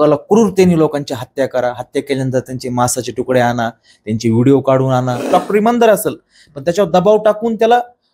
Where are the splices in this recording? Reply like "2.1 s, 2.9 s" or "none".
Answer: 5.2 s